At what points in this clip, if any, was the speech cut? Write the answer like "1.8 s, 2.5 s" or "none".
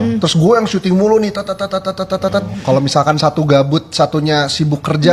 2.5 s